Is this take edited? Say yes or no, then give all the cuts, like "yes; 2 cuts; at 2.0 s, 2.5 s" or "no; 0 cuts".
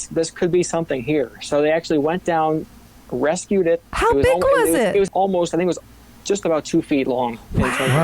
yes; 1 cut; at 5.1 s